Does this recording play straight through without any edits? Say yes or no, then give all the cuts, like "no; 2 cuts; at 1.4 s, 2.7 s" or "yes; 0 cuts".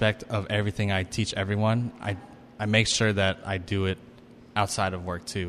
yes; 0 cuts